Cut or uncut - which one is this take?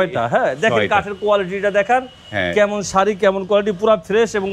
uncut